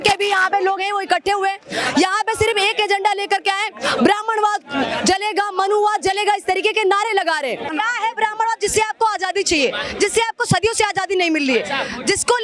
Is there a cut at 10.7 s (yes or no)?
no